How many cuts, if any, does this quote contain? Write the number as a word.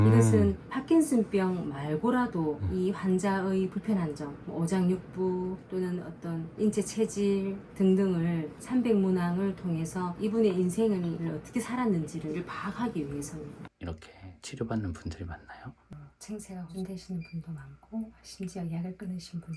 two